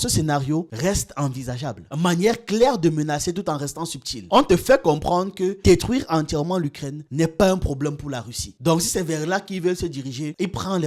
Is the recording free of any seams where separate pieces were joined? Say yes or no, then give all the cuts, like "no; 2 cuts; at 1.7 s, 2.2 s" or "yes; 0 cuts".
yes; 0 cuts